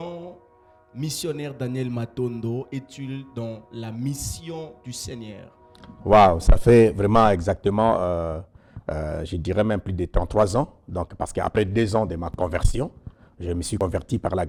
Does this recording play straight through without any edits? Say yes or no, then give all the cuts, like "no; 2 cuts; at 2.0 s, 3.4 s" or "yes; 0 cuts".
yes; 0 cuts